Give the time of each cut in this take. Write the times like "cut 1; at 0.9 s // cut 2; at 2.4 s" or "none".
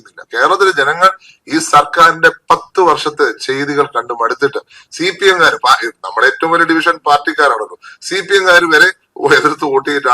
none